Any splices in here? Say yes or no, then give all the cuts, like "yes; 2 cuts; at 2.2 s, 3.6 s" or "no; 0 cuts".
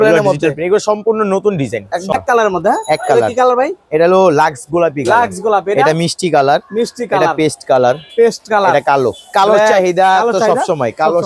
yes; 1 cut; at 2.1 s